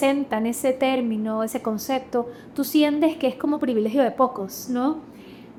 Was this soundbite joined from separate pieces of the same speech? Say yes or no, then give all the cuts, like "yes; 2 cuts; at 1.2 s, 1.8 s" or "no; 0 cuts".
no; 0 cuts